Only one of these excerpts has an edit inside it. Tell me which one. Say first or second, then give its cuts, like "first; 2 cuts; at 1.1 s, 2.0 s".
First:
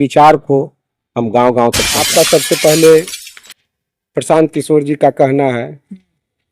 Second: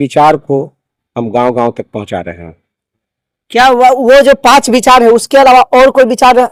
first; 1 cut; at 2.0 s